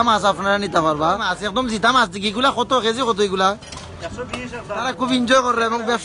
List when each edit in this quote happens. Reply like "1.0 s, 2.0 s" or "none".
1.4 s, 4.9 s